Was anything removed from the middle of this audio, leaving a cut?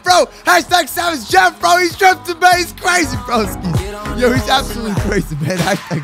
no; 0 cuts

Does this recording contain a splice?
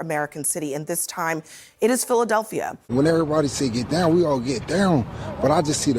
yes; 1 cut; at 2.8 s

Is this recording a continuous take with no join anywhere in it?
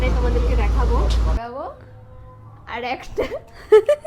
no; 1 cut; at 1.4 s

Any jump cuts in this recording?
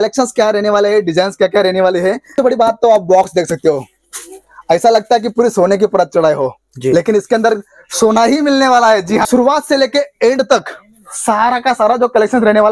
yes; 2 cuts; at 2.3 s, 9.2 s

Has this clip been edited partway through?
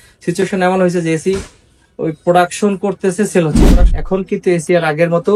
yes; 1 cut; at 3.6 s

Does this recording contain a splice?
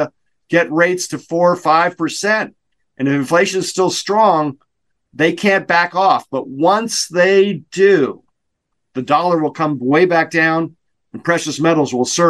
no; 0 cuts

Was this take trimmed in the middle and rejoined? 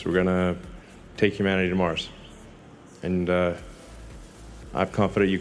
no; 0 cuts

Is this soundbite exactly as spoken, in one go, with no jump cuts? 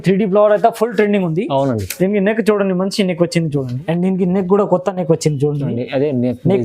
no; 1 cut; at 3.8 s

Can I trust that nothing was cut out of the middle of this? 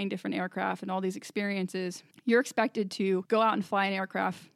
no; 2 cuts; at 2.1 s, 3.2 s

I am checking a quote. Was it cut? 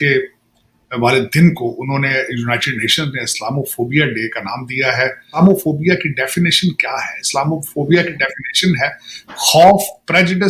yes; 1 cut; at 5.2 s

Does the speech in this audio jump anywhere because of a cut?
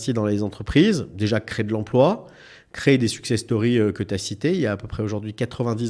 no; 0 cuts

